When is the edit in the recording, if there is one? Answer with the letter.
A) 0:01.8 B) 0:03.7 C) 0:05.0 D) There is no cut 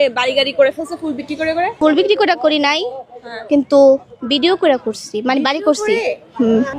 A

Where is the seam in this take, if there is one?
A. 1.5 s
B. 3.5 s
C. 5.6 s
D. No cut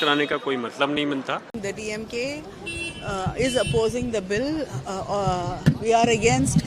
A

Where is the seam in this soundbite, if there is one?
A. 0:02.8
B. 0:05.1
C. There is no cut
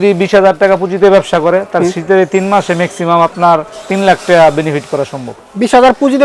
C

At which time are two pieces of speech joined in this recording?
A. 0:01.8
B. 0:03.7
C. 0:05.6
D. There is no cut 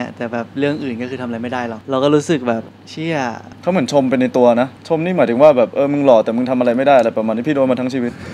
A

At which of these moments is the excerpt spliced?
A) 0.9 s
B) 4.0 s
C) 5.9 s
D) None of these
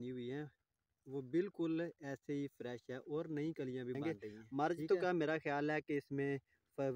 B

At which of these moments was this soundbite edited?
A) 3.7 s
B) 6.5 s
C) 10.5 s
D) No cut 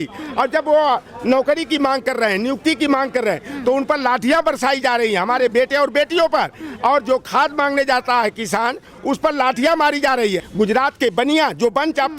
C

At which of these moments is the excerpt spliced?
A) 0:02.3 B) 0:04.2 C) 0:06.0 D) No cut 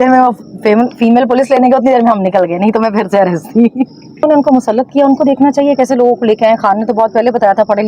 B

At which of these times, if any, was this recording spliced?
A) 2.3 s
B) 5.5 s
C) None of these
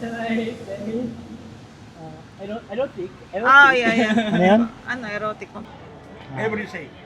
B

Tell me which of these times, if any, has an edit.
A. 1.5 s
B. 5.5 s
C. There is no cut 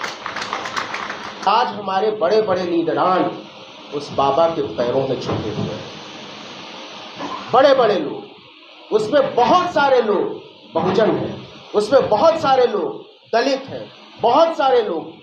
A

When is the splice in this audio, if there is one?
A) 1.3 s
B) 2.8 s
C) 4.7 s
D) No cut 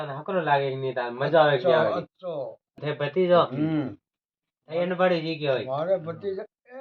B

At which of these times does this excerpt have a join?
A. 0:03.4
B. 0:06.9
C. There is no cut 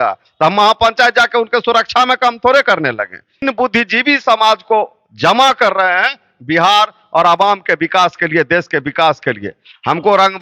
A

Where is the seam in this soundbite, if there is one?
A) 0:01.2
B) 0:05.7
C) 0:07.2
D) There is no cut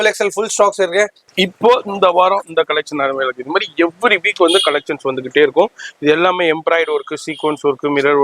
A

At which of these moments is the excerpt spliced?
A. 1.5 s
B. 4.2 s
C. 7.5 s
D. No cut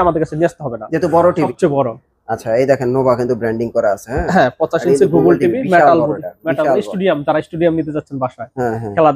A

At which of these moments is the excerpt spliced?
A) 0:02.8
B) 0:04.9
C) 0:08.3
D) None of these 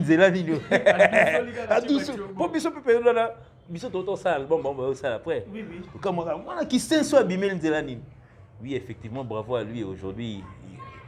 D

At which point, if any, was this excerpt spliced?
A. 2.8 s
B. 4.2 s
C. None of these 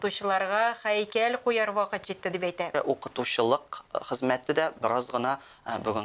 A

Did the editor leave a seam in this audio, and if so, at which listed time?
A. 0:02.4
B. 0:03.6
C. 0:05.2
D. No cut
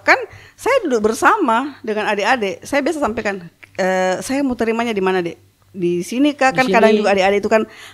D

